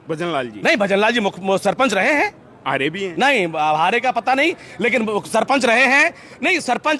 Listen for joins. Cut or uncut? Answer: uncut